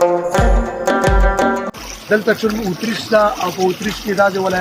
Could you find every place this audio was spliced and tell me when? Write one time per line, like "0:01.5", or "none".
0:01.7